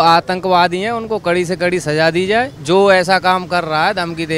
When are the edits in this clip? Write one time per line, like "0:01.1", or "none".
0:02.6